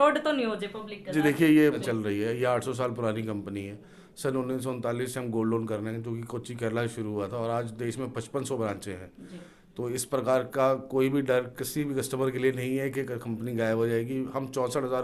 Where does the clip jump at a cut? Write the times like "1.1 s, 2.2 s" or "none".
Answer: 1.8 s